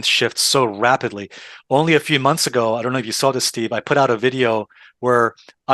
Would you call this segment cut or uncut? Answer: uncut